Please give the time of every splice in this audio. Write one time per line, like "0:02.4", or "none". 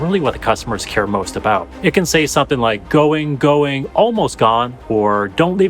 0:01.7